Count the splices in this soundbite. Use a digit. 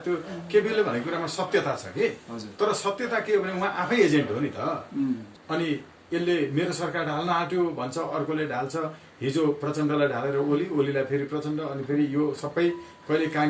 1